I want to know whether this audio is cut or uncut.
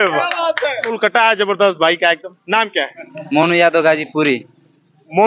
cut